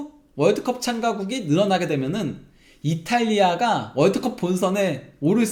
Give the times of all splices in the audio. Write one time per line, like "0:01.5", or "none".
none

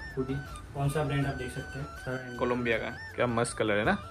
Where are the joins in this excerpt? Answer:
0:03.1

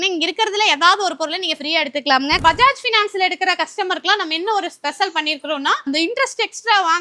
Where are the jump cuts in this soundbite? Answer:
0:02.4
0:05.8

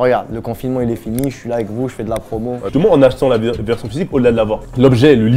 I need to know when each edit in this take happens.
0:02.7

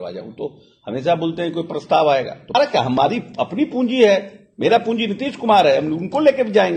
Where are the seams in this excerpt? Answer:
0:02.5

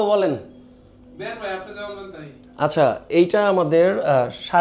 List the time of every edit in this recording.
none

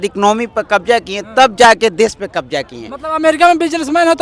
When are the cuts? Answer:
none

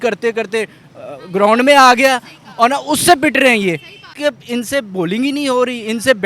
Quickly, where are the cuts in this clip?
0:04.1

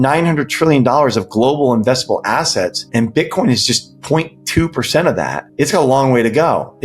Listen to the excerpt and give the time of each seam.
0:02.8
0:05.5

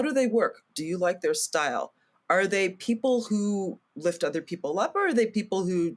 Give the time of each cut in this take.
none

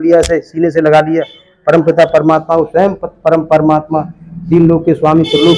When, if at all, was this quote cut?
none

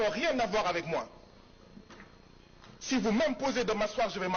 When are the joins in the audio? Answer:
none

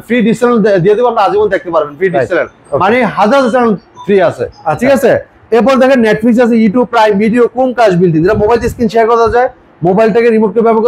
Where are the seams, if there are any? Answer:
none

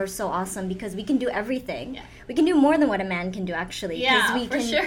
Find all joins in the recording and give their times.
none

